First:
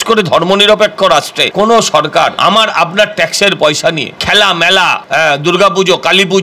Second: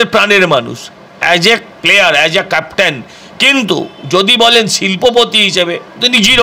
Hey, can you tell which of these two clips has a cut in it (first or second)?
first